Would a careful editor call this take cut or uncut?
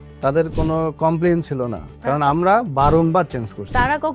cut